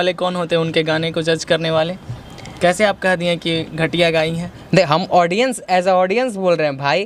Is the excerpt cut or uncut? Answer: uncut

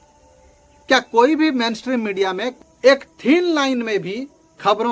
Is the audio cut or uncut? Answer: cut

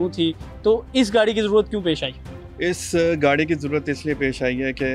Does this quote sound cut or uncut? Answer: uncut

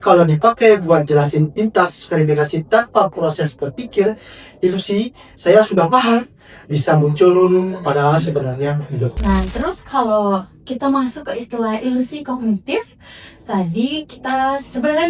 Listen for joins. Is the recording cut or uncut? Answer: cut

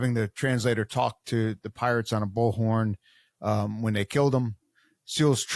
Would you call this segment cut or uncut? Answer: uncut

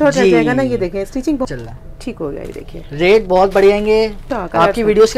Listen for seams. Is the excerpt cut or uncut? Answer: cut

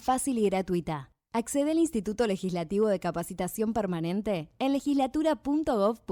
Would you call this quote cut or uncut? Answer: uncut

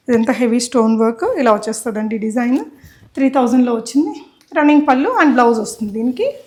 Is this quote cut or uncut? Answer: uncut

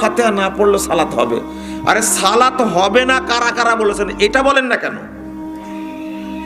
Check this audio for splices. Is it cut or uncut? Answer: uncut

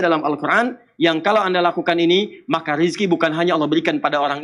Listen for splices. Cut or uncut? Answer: uncut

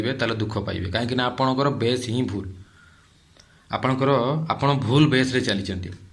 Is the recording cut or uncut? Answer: uncut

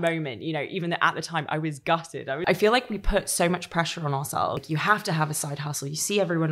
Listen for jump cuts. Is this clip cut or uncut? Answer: cut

